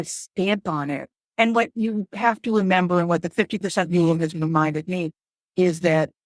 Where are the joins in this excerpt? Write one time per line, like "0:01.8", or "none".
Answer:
0:01.1